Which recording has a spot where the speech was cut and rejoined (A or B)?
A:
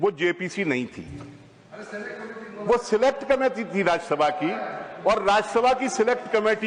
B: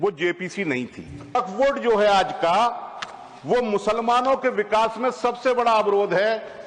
B